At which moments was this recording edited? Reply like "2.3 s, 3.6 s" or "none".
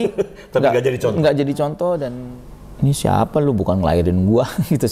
2.1 s